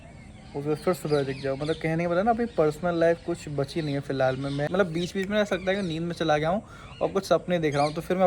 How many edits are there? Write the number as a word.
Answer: one